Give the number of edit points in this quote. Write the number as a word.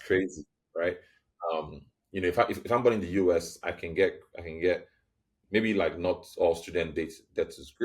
zero